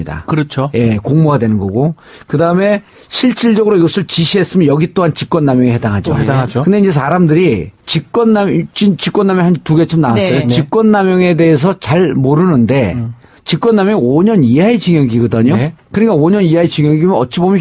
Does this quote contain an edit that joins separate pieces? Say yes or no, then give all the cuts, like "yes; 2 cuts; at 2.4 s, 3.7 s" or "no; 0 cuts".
yes; 1 cut; at 8.7 s